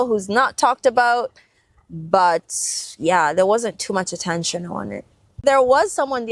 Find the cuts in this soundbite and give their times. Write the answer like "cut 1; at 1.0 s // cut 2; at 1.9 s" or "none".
cut 1; at 5.4 s